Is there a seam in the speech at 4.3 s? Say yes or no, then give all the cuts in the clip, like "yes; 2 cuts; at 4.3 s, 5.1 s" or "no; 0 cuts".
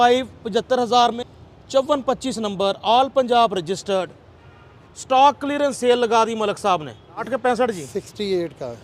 no; 2 cuts; at 1.2 s, 7.2 s